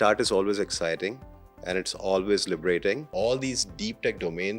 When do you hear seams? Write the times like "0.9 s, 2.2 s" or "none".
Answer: 3.1 s

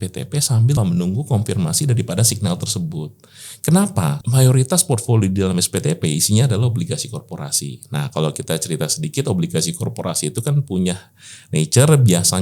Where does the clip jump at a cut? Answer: 0.8 s, 4.2 s

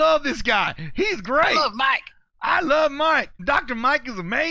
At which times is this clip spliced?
3.3 s

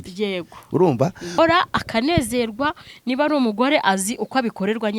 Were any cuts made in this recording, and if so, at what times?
1.4 s

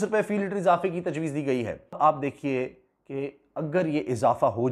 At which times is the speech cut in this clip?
1.8 s

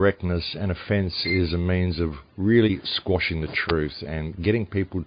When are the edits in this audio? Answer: 3.2 s

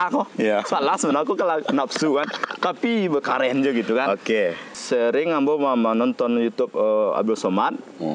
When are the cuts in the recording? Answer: 4.8 s

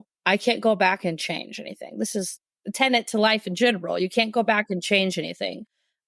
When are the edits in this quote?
2.3 s

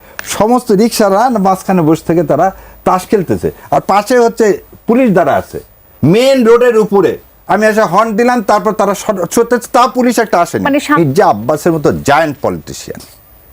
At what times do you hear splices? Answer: 11.0 s

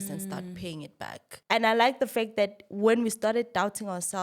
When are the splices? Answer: 1.3 s

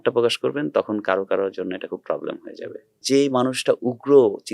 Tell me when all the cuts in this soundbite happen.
3.0 s

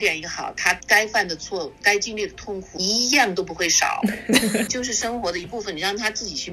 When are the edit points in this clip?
none

